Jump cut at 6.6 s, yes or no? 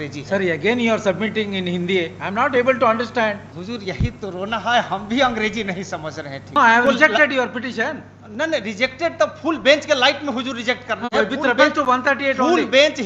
yes